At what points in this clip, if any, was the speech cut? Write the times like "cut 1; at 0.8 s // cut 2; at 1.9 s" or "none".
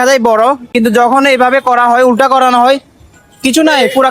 none